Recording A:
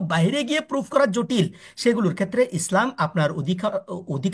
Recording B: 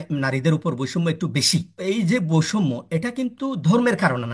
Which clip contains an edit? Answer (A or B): B